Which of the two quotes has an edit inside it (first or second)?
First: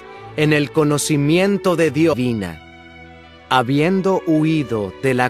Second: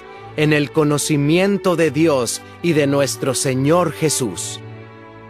second